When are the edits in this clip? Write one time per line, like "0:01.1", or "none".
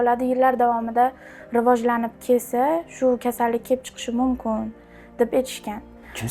none